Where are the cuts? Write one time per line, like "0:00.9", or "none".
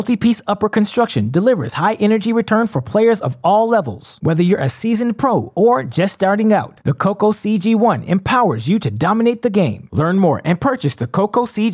none